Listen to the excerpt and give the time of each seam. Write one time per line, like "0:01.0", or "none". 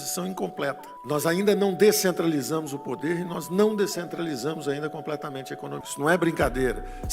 0:05.9